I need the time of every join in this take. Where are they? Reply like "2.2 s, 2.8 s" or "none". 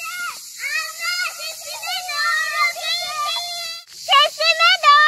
4.0 s

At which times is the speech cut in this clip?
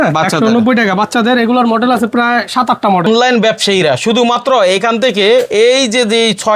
3.1 s

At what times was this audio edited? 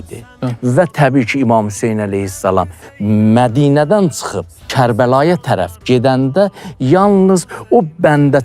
4.7 s

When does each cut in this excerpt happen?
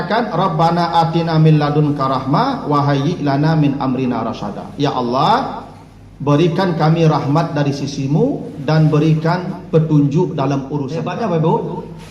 11.0 s

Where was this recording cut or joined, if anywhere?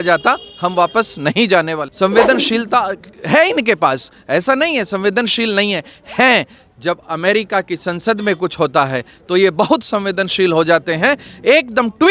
1.8 s

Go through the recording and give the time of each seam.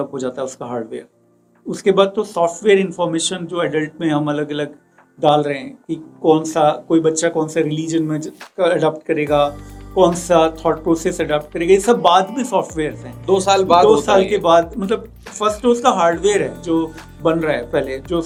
none

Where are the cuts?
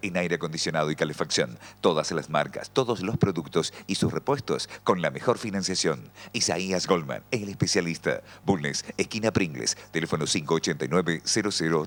none

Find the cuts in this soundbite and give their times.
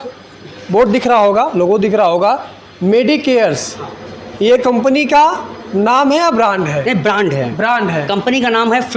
none

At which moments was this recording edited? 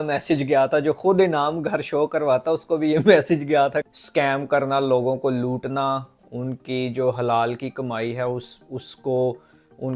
3.9 s

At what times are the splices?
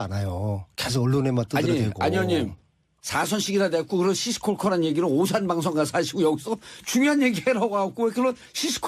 6.8 s

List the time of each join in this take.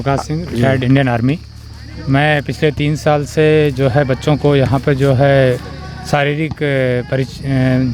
none

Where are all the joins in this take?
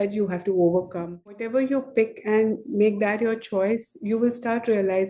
1.4 s

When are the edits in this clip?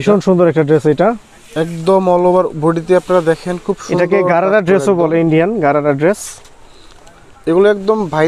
none

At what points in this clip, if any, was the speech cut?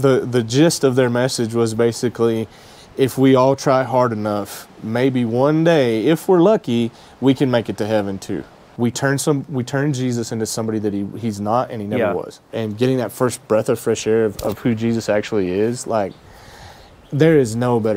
8.6 s, 12.5 s

